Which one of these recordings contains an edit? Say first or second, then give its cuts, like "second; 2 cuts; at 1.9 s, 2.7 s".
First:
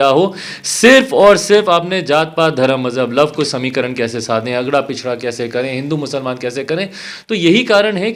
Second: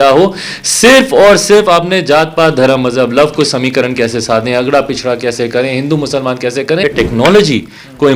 second; 1 cut; at 6.8 s